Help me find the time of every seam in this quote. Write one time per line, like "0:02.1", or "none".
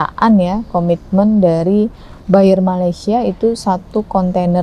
none